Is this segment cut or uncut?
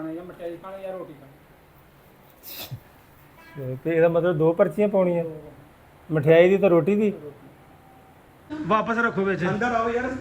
cut